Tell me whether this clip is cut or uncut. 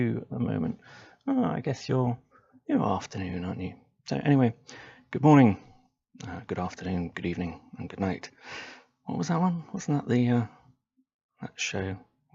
uncut